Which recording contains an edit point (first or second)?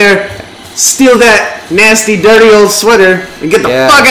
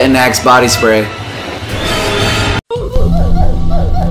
second